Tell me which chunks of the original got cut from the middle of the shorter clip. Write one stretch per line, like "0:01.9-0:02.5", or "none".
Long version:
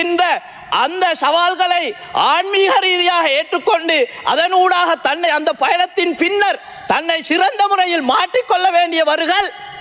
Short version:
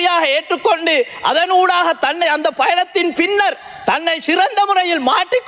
none